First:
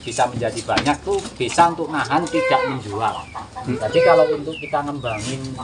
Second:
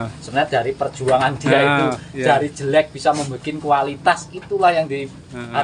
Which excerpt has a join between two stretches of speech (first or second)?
first